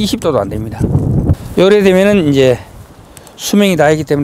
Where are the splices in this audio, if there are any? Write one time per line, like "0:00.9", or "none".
0:01.4